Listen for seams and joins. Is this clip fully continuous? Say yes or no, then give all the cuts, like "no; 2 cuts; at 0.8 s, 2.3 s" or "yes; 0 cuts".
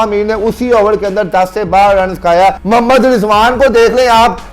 no; 1 cut; at 2.6 s